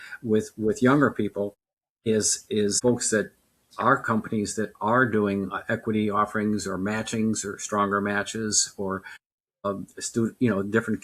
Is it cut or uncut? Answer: uncut